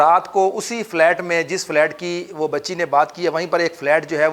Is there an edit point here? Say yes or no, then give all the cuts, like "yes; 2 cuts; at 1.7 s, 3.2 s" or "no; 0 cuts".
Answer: no; 0 cuts